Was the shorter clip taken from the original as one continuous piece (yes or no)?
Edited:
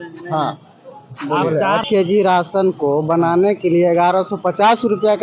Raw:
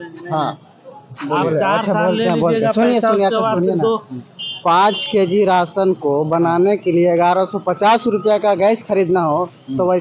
no